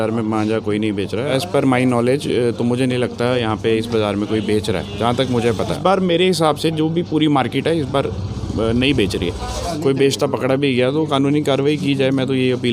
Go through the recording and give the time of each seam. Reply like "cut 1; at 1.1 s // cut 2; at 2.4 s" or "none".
cut 1; at 1.3 s // cut 2; at 5.8 s // cut 3; at 9.5 s